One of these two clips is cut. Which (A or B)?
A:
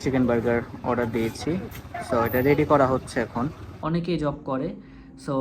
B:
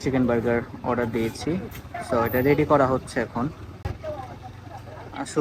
A